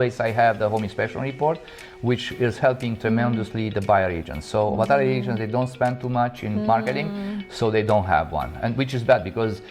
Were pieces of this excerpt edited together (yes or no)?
no